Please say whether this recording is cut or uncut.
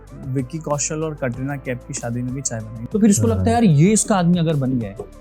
cut